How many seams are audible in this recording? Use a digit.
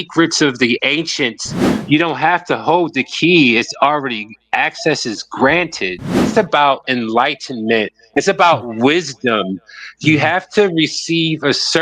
2